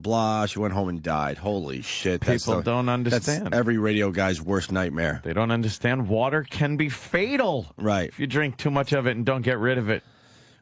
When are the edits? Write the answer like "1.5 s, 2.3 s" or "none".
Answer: 8.3 s